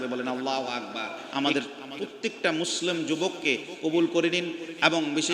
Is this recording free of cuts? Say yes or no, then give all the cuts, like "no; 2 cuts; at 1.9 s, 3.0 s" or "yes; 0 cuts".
no; 1 cut; at 1.2 s